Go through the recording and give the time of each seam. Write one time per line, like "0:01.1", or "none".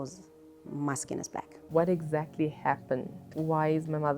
0:01.6
0:03.2